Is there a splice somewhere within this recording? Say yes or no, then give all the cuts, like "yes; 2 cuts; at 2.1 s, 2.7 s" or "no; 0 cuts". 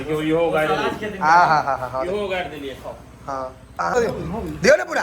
yes; 1 cut; at 3.9 s